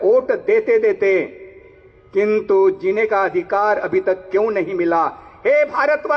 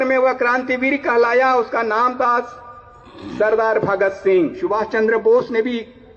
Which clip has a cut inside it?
second; 1 cut; at 4.6 s

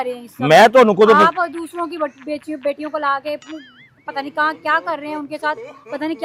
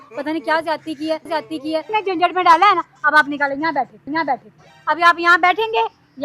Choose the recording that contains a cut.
second; 1 cut; at 1.9 s

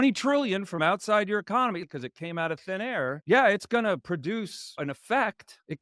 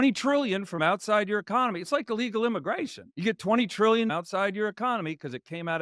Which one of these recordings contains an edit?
first; 1 cut; at 1.8 s

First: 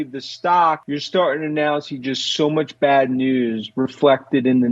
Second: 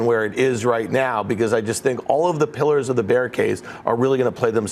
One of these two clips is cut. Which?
first; 1 cut; at 0.9 s

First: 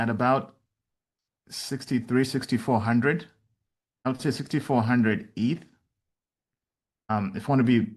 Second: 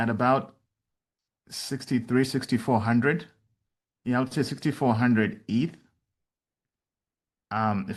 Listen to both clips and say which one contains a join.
first; 2 cuts; at 4.0 s, 7.1 s

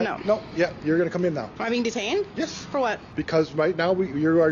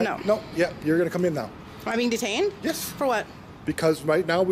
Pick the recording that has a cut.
first; 2 cuts; at 1.5 s, 3.0 s

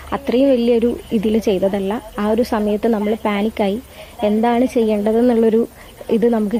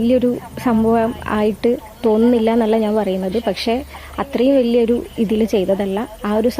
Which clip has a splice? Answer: second; 1 cut; at 3.1 s

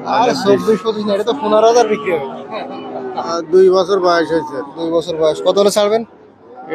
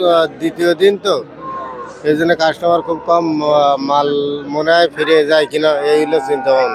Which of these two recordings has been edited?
first; 1 cut; at 3.3 s

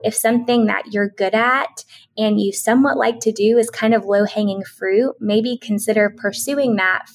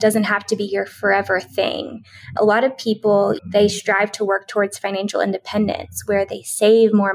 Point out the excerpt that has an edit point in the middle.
second; 2 cuts; at 2.3 s, 3.4 s

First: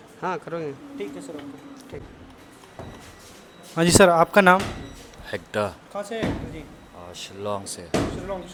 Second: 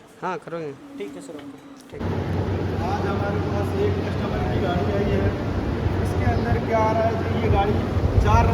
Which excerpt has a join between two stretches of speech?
second; 1 cut; at 2.0 s

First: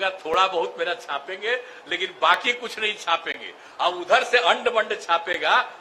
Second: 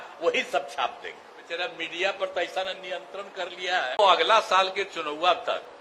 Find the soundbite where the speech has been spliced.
second; 2 cuts; at 1.5 s, 4.0 s

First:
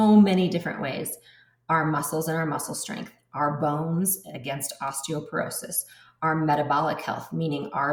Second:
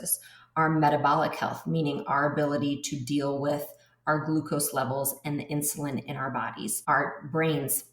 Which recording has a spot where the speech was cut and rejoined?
second; 1 cut; at 6.8 s

